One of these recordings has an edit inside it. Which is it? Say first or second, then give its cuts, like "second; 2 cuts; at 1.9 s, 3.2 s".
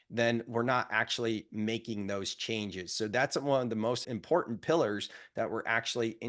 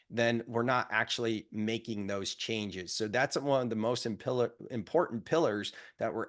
first; 1 cut; at 4.0 s